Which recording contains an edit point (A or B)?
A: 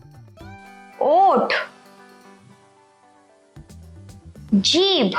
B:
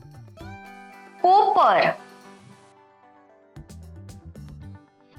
A